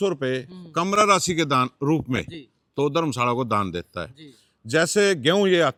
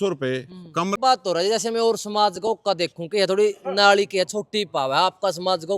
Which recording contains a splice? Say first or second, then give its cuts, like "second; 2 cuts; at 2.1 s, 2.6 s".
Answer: second; 1 cut; at 1.0 s